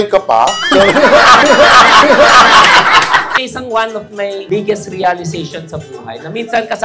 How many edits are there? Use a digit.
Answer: 1